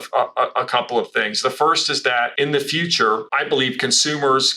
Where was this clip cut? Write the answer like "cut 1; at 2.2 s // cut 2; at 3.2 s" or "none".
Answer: cut 1; at 2.3 s // cut 2; at 3.3 s